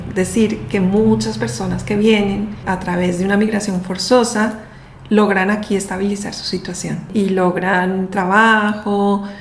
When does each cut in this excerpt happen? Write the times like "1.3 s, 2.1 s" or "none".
2.6 s, 7.1 s